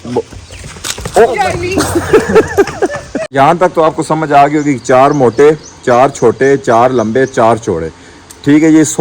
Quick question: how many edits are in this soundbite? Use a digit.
1